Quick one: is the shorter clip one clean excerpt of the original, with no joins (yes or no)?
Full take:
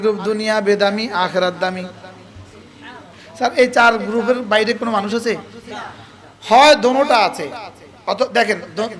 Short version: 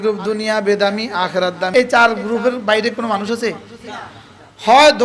no